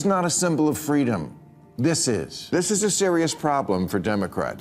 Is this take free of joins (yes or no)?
no